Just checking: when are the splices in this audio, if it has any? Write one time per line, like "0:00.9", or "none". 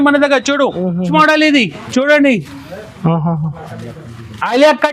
0:01.1